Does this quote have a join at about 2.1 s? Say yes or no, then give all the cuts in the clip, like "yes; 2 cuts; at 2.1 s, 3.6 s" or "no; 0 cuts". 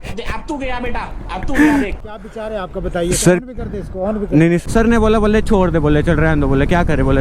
yes; 2 cuts; at 2.1 s, 4.6 s